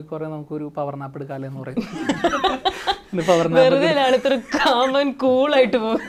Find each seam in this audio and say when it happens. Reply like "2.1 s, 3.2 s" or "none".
none